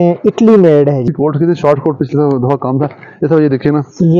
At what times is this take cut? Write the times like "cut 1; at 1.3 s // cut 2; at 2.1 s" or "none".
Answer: cut 1; at 1.0 s